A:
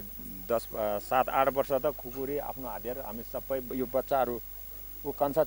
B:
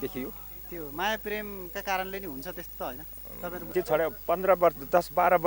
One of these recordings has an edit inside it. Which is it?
B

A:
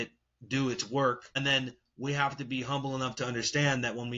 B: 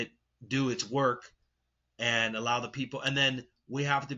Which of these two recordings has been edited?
A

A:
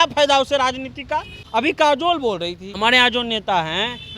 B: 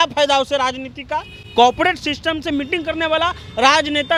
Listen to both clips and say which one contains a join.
A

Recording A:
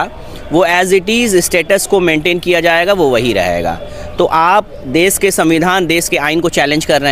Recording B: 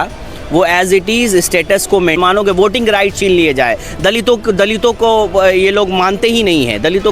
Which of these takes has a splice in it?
B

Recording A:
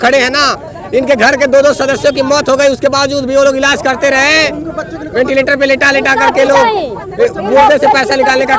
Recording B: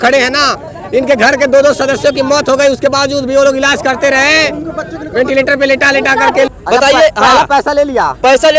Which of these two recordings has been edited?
B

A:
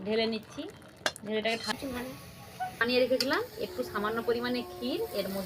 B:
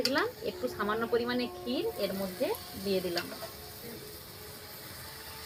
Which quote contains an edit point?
A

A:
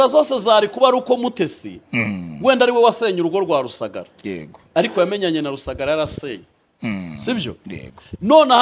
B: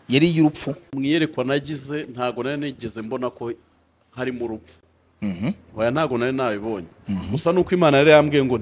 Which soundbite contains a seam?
B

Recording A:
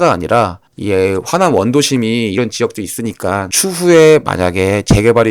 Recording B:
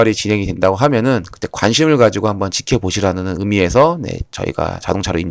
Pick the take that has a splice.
A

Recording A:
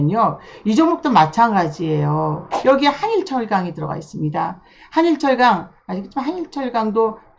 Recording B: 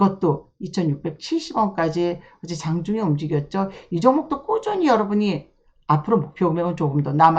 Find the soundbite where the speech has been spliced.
A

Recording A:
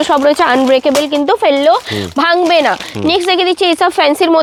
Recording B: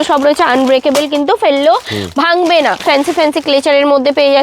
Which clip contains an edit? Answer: B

